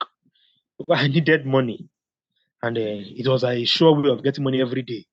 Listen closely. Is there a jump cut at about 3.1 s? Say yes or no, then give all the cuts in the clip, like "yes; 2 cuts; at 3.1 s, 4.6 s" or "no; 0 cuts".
no; 0 cuts